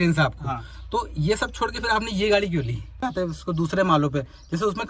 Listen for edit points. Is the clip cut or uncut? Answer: cut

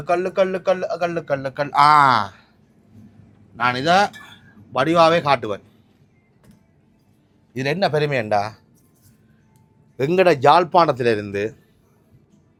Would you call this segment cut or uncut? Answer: uncut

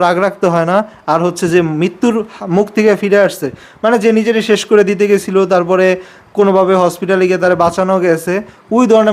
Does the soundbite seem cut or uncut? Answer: uncut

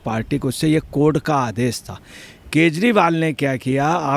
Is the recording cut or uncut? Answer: uncut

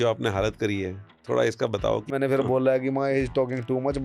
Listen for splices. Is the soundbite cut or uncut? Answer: cut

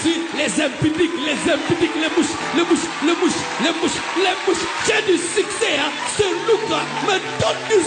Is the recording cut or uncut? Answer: uncut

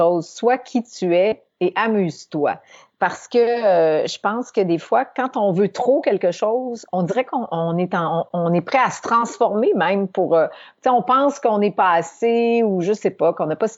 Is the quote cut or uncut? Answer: uncut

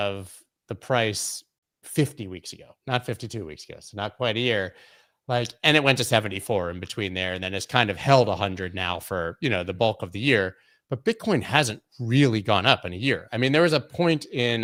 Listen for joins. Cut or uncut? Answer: uncut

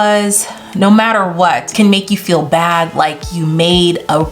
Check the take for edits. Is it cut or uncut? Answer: cut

